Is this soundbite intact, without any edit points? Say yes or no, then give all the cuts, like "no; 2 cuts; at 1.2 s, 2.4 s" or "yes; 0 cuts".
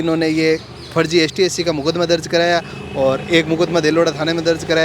yes; 0 cuts